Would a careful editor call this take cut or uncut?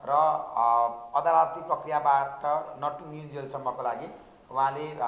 uncut